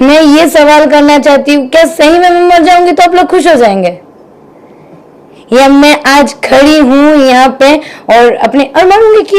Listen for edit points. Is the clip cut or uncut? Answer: uncut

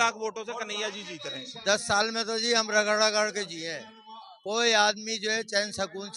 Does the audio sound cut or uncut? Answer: cut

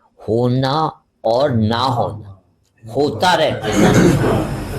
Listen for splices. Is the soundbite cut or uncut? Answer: uncut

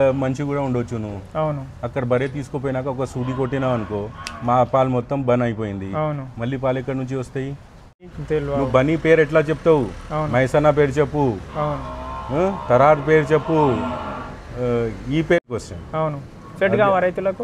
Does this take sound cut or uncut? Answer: cut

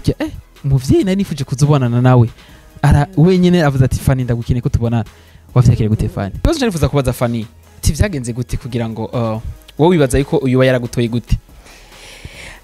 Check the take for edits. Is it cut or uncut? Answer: cut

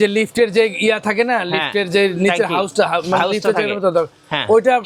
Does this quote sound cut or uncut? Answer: uncut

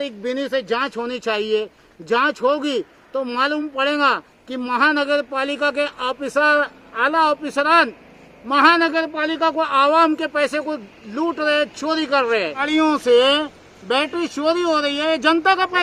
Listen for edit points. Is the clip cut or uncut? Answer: uncut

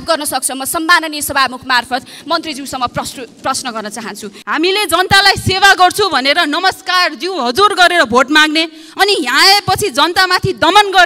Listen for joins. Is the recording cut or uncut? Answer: cut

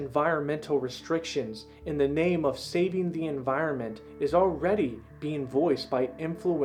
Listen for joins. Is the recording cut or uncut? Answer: uncut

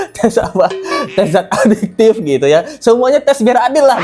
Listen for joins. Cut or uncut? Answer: uncut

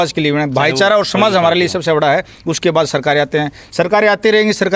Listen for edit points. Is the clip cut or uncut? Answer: uncut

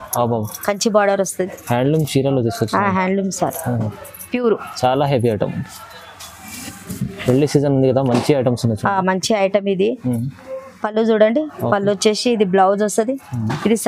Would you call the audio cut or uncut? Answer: uncut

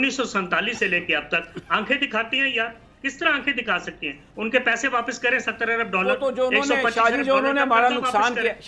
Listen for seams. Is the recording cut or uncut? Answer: uncut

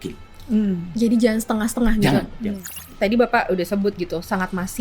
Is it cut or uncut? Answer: cut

